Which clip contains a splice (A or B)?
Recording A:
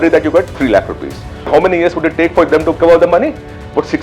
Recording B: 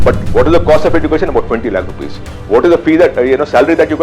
A